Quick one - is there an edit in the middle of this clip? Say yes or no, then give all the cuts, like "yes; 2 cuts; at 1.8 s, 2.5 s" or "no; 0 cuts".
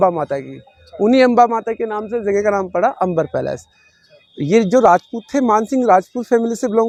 no; 0 cuts